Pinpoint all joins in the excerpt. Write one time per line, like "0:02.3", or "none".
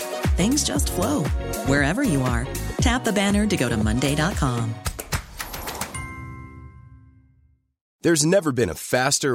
0:07.8